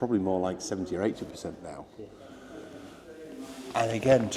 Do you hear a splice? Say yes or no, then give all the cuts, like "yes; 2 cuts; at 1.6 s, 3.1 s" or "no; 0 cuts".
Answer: no; 0 cuts